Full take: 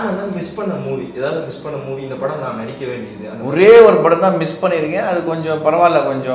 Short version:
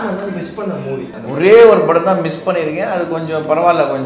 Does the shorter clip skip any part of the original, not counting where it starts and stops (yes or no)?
yes